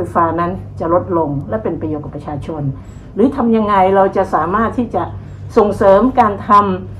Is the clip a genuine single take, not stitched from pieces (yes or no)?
yes